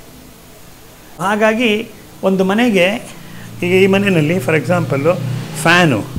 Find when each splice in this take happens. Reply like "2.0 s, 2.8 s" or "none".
1.2 s